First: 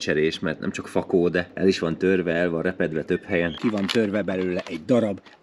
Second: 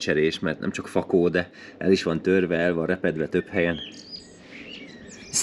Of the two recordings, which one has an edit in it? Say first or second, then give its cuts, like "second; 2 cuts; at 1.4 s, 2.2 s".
first; 2 cuts; at 1.5 s, 3.6 s